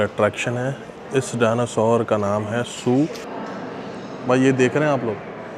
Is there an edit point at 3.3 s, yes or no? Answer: yes